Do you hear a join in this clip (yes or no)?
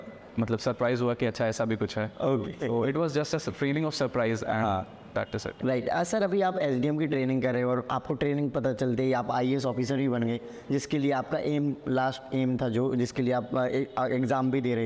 no